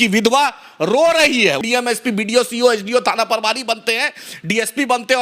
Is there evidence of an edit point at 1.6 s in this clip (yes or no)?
yes